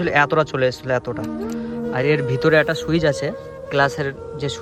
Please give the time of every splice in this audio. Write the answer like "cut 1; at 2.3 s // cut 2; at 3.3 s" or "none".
none